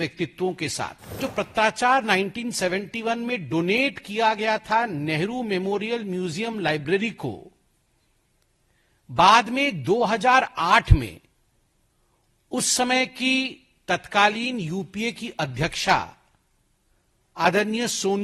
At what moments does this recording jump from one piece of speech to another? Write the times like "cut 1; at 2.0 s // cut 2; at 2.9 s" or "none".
cut 1; at 1.2 s